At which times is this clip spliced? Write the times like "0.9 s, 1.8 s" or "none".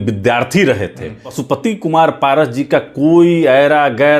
1.3 s

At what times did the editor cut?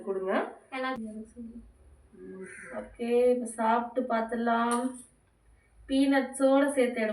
1.0 s

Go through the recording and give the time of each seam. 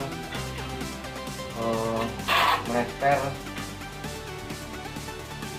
none

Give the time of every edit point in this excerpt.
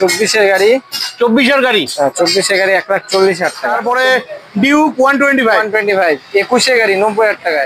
3.6 s

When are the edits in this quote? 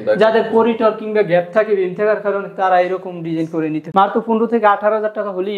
3.8 s

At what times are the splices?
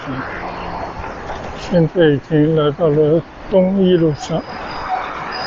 1.2 s

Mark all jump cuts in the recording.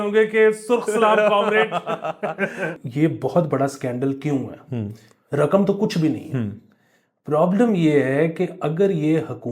2.7 s

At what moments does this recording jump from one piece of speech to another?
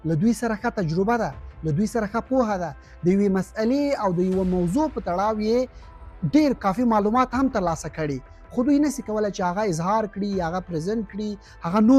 none

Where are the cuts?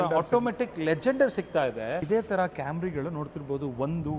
2.0 s

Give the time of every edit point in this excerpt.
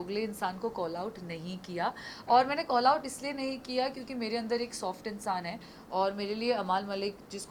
none

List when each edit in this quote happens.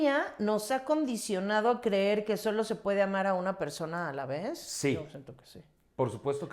none

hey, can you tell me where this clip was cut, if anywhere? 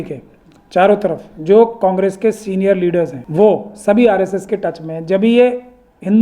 3.2 s

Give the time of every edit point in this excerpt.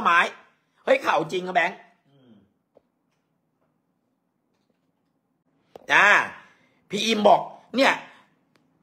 5.4 s

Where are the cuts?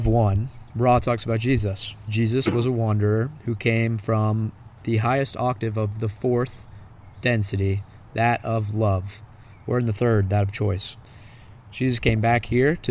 2.1 s

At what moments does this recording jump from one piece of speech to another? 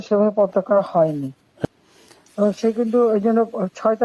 1.7 s

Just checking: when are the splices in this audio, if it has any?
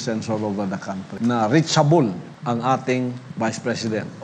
1.1 s, 2.3 s, 3.2 s

